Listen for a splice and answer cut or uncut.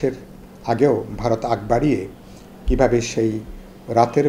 uncut